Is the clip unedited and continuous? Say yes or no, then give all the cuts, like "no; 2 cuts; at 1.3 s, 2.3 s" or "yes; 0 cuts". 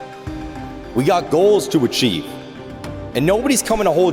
no; 1 cut; at 0.9 s